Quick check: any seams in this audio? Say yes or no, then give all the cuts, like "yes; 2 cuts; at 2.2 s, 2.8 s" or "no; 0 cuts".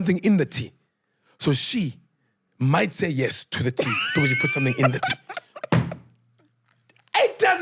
no; 0 cuts